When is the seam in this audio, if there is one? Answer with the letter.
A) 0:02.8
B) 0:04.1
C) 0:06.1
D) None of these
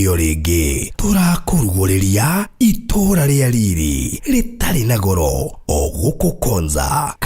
C